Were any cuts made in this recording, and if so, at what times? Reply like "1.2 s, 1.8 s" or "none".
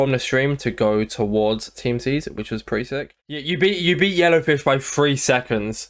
3.4 s